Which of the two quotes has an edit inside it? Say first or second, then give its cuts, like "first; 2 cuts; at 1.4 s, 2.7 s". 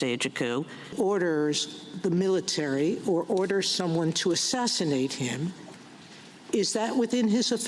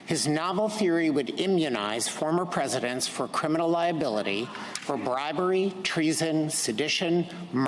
first; 1 cut; at 1.0 s